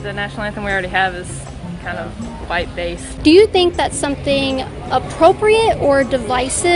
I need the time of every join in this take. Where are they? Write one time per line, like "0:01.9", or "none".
none